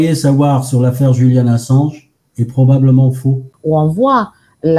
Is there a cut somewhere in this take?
yes; 1 cut; at 3.5 s

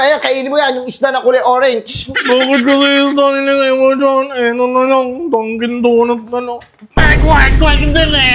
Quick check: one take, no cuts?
yes; 0 cuts

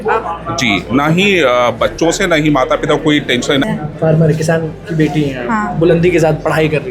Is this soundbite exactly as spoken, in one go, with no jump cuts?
no; 1 cut; at 3.6 s

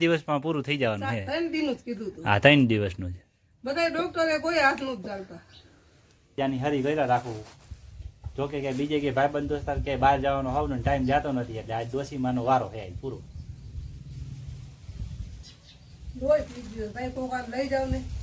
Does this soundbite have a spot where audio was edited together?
yes; 1 cut; at 6.4 s

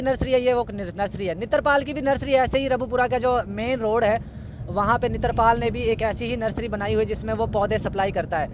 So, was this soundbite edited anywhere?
no; 0 cuts

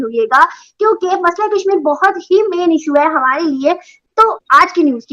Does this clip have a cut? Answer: yes; 1 cut; at 3.9 s

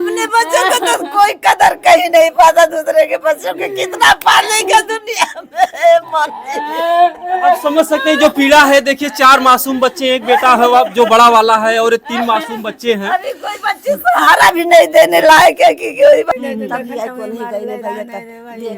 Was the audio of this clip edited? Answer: yes; 1 cut; at 16.3 s

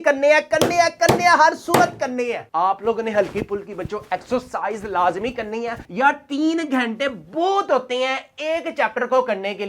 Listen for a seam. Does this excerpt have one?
yes; 2 cuts; at 2.4 s, 5.8 s

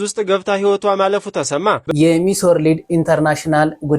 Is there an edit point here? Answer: yes; 1 cut; at 1.9 s

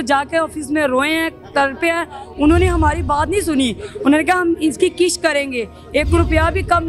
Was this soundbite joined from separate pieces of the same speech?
no; 0 cuts

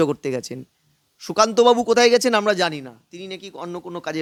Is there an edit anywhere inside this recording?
no; 0 cuts

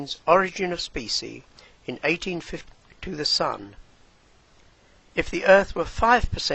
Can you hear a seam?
no; 0 cuts

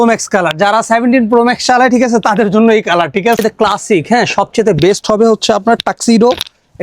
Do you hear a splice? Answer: yes; 1 cut; at 3.4 s

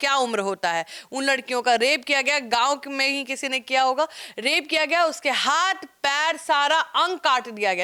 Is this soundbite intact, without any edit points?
yes; 0 cuts

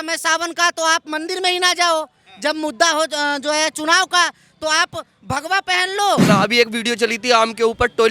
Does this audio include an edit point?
yes; 1 cut; at 6.3 s

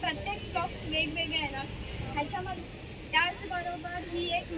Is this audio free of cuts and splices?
no; 1 cut; at 2.6 s

